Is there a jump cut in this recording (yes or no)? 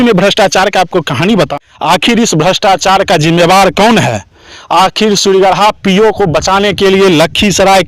yes